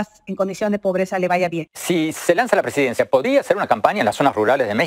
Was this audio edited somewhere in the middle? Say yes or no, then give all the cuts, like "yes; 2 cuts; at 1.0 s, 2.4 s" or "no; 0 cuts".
yes; 1 cut; at 1.7 s